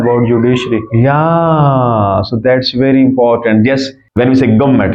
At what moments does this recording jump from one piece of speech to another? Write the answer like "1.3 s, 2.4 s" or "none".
4.0 s

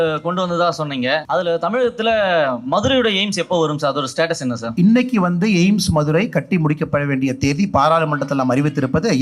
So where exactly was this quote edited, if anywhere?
1.2 s, 4.7 s

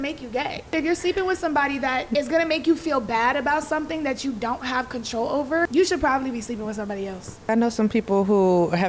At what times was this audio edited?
0.7 s, 2.1 s, 5.7 s, 7.5 s

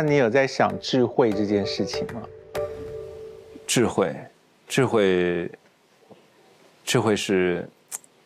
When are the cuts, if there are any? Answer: none

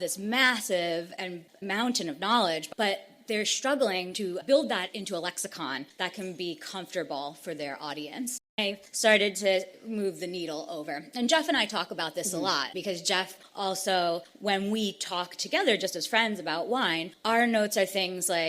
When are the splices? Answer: 1.5 s, 2.7 s, 8.5 s

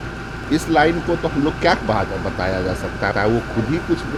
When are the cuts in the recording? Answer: none

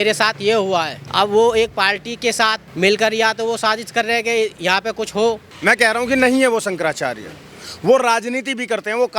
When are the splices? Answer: 1.0 s, 2.6 s, 5.5 s

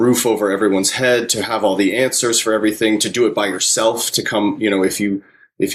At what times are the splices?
none

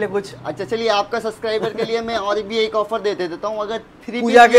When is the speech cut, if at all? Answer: none

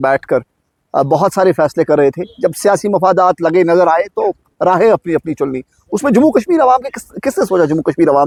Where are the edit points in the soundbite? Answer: none

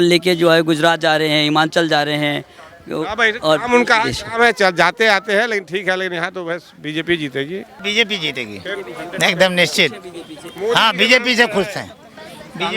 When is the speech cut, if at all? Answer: 7.7 s

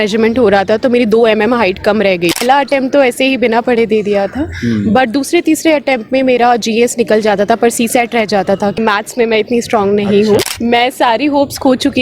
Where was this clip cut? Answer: 2.4 s, 8.8 s, 10.5 s

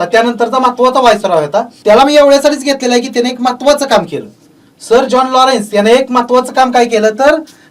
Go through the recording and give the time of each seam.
1.7 s

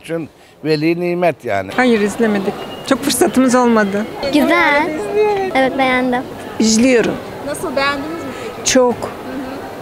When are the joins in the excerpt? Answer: 1.7 s, 4.2 s, 6.4 s

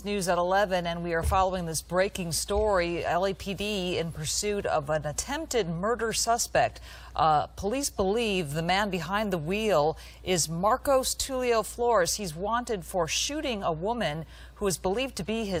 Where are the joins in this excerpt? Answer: none

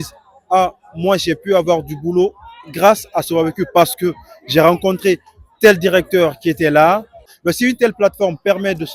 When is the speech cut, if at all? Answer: 7.2 s

